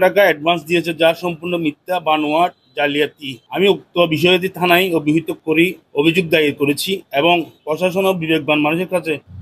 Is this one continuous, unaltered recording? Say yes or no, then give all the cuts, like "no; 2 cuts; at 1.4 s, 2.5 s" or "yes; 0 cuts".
yes; 0 cuts